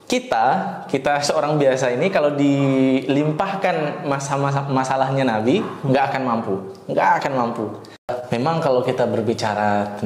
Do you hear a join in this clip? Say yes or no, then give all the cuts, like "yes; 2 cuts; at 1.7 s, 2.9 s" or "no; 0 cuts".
yes; 1 cut; at 8.1 s